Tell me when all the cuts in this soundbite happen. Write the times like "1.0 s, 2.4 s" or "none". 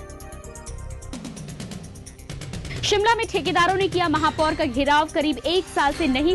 1.5 s